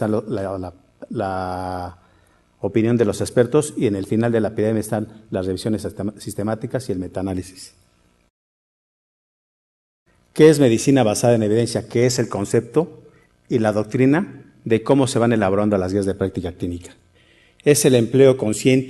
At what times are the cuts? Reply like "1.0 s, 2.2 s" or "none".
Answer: 6.6 s